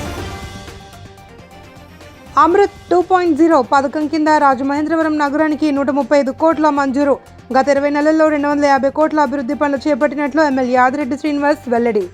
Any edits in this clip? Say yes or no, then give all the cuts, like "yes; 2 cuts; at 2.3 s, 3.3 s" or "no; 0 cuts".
yes; 1 cut; at 1.1 s